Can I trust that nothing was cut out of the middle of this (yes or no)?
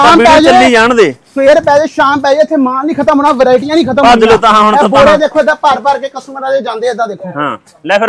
yes